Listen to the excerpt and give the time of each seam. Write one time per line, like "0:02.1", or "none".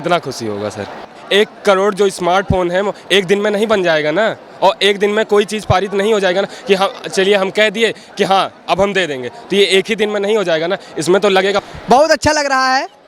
0:01.1
0:11.7

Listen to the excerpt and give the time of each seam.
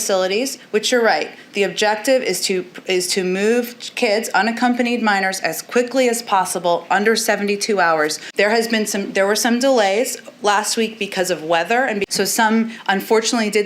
0:08.3
0:12.1

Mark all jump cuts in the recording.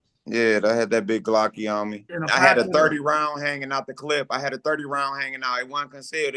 0:02.1

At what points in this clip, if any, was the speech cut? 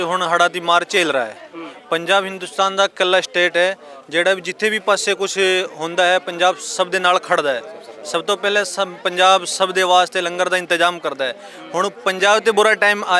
none

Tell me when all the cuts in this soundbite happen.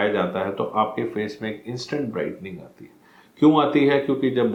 none

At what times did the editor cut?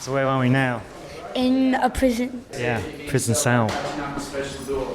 0:02.5

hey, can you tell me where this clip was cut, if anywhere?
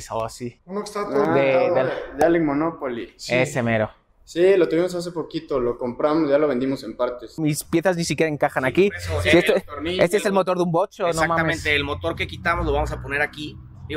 0:07.4

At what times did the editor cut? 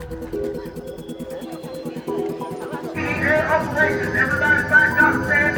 none

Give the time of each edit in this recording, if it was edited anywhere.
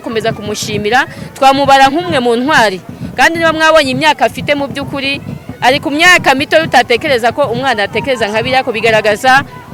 none

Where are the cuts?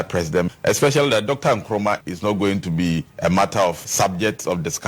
0:03.1
0:03.8

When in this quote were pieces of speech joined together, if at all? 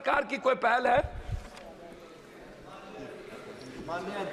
none

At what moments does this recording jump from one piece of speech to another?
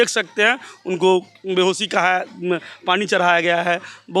none

